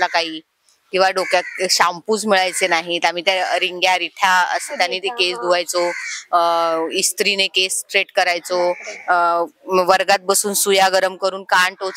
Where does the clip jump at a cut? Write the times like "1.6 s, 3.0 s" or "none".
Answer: none